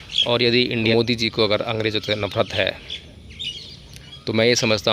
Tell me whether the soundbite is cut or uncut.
cut